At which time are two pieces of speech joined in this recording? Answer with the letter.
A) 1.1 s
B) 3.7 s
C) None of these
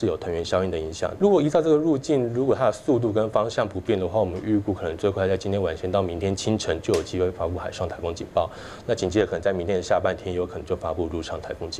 A